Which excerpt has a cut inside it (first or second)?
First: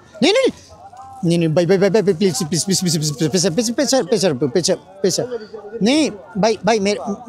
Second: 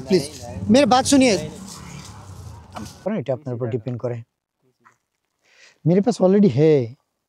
second